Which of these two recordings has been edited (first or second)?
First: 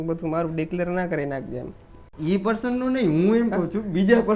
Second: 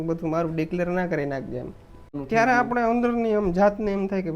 second